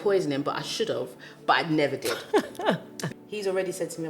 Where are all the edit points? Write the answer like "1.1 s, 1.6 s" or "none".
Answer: 3.0 s